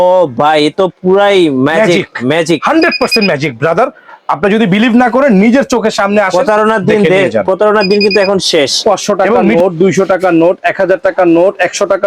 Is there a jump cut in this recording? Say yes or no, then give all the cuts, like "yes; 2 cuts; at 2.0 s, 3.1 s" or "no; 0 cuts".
yes; 1 cut; at 9.2 s